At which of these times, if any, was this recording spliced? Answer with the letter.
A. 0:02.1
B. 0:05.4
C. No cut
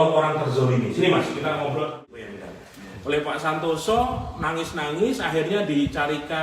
A